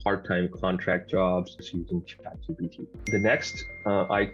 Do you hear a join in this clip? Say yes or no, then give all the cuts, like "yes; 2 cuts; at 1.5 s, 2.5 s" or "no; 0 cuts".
yes; 2 cuts; at 1.7 s, 2.9 s